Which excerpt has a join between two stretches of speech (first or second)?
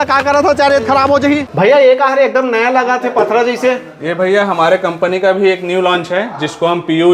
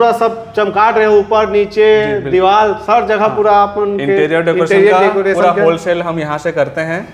first